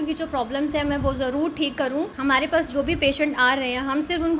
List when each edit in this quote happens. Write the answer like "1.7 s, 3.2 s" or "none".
2.1 s